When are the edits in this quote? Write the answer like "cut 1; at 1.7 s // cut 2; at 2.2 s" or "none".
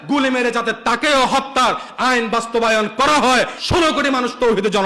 cut 1; at 3.6 s